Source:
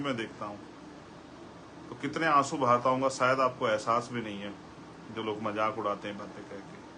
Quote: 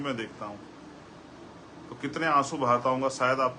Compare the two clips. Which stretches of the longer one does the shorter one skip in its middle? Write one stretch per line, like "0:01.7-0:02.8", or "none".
none